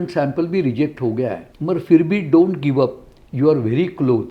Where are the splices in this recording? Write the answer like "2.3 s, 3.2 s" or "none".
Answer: 1.5 s